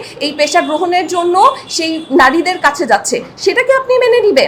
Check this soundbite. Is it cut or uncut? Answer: uncut